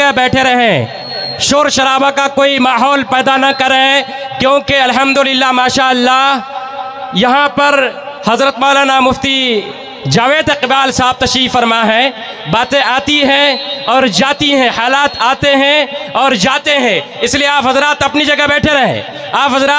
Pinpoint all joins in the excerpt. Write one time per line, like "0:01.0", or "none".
none